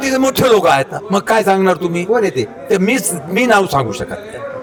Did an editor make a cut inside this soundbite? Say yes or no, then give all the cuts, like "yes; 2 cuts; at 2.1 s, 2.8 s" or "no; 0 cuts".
no; 0 cuts